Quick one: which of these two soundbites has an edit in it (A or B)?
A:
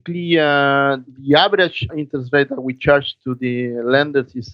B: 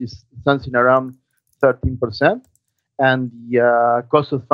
A